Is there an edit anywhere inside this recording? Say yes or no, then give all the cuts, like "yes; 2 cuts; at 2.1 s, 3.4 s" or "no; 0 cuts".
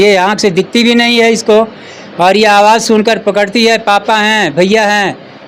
no; 0 cuts